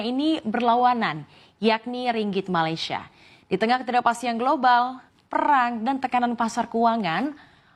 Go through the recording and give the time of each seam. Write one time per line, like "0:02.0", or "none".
none